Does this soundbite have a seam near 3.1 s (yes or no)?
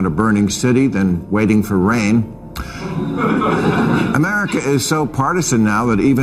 no